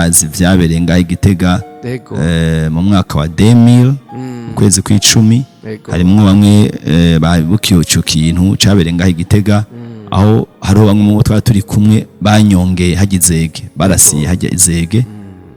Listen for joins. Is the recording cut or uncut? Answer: uncut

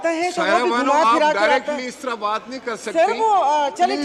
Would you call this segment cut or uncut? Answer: uncut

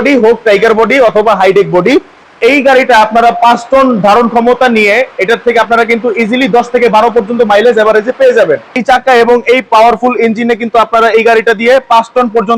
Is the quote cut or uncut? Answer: cut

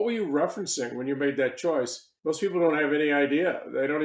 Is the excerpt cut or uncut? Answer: cut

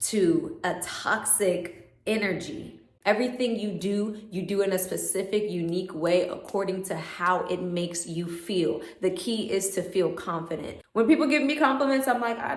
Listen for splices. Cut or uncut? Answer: cut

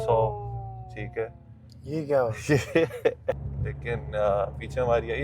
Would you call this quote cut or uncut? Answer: cut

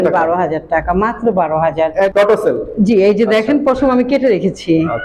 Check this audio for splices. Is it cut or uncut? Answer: cut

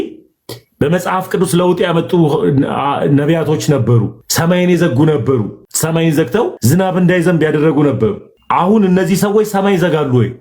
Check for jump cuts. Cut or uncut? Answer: cut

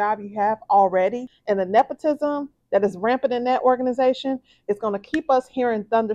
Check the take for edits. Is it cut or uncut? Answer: cut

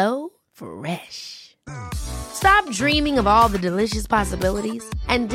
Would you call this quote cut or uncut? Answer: uncut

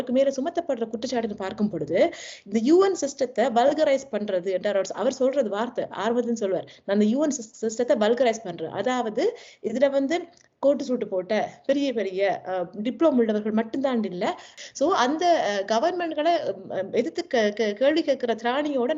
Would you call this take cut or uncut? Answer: cut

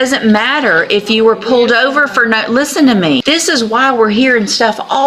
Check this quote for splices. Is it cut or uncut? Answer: cut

